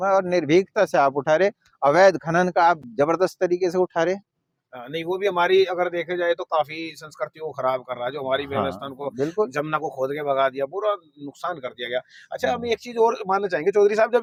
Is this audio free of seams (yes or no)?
yes